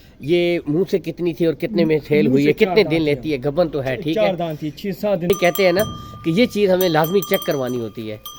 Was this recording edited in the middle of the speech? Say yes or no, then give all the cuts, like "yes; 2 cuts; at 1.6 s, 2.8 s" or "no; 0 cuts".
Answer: yes; 1 cut; at 5.3 s